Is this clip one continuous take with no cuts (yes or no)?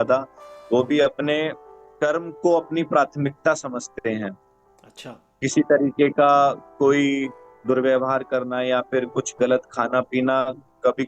yes